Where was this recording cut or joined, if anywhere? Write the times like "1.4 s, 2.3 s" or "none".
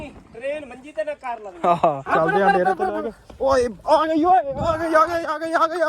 2.1 s